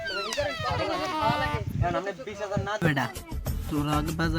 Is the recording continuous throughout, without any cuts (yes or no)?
no